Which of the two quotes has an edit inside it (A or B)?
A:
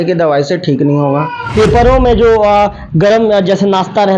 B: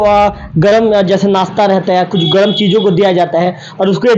A